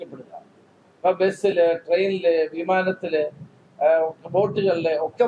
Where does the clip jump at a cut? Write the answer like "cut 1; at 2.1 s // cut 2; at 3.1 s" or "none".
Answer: none